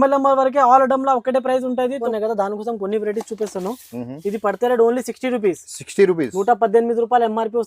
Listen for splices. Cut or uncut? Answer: cut